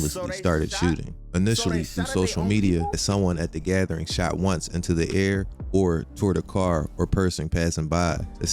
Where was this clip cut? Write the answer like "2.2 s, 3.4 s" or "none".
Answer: 3.0 s

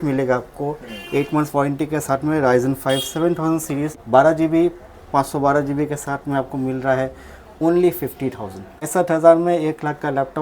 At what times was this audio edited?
4.0 s, 8.9 s

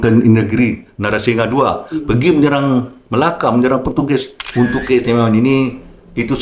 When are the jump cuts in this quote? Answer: 4.4 s

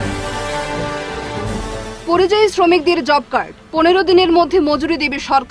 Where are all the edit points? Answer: 1.6 s

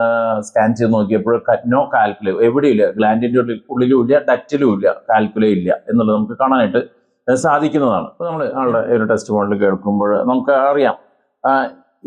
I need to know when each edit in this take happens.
none

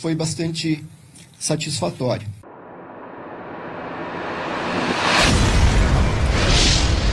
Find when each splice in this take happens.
2.4 s

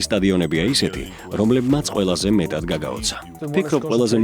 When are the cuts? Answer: 3.3 s

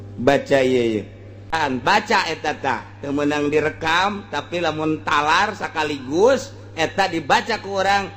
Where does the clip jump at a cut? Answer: 1.6 s

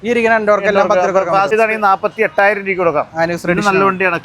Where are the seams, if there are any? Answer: 1.5 s

